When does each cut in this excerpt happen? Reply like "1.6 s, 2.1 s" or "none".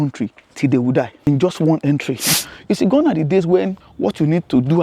1.1 s, 2.3 s, 3.8 s